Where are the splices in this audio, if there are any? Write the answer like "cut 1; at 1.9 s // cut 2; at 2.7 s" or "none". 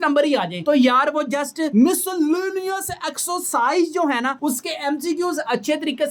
none